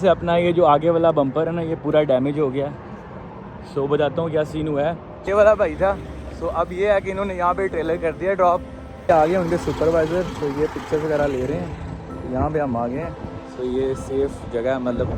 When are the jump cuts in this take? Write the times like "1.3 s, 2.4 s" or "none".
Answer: 5.1 s, 9.1 s